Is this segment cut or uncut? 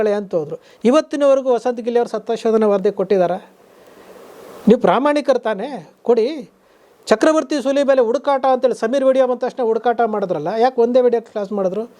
uncut